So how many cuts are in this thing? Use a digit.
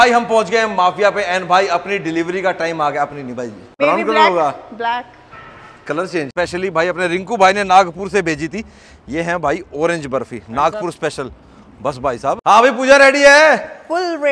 3